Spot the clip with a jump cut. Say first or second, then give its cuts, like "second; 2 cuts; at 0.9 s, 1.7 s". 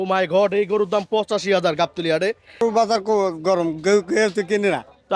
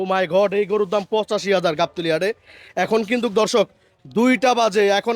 first; 1 cut; at 2.6 s